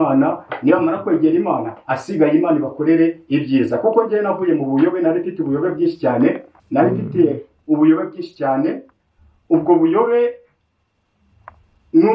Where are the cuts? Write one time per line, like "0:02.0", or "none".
none